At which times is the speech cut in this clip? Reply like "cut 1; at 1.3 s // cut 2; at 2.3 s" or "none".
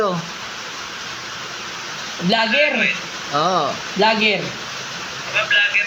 none

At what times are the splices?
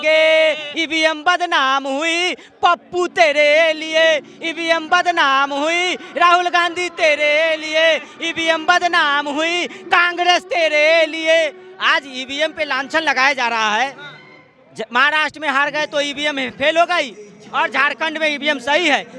none

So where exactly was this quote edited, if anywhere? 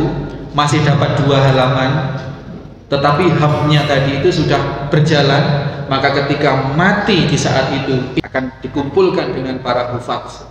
cut 1; at 8.2 s

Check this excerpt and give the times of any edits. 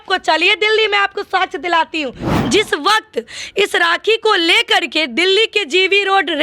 cut 1; at 2.3 s

